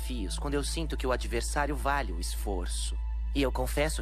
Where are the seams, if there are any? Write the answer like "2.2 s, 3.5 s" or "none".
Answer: none